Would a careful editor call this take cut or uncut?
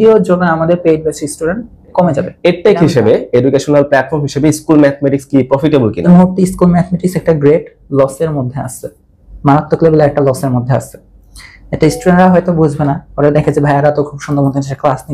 cut